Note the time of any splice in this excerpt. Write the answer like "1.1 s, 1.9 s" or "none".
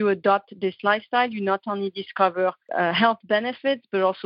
2.6 s